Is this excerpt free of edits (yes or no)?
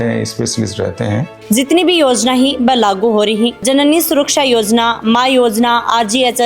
no